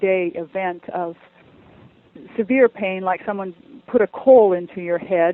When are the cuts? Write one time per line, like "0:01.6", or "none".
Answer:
none